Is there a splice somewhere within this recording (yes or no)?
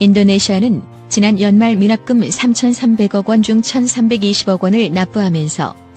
no